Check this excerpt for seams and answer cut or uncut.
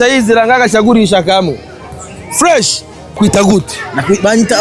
cut